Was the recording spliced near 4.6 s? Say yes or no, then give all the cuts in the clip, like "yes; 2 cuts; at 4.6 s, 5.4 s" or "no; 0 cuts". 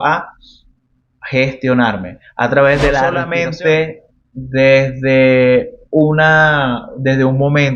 no; 1 cut; at 3.2 s